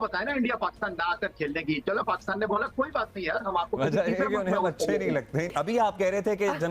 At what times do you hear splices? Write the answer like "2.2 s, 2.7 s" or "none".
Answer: 5.5 s